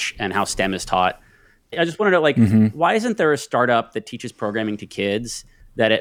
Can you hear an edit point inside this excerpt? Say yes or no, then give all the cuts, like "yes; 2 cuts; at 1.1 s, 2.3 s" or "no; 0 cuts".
yes; 1 cut; at 1.6 s